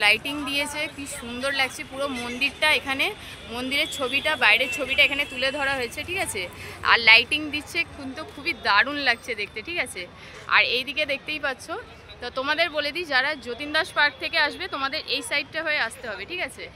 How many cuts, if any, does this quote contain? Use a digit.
0